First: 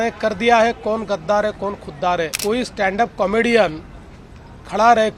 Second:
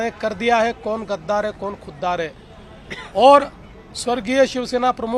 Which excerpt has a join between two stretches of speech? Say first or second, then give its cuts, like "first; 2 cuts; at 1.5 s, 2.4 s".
first; 1 cut; at 2.3 s